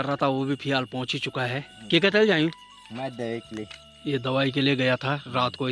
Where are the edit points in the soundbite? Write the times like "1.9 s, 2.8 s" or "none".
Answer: none